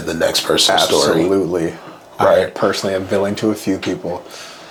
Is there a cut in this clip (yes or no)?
no